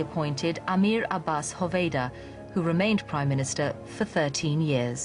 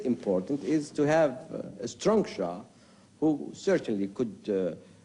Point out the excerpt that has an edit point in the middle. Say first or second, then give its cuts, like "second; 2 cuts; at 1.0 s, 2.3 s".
second; 1 cut; at 2.4 s